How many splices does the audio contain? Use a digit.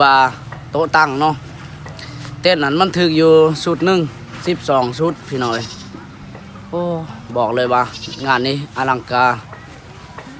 0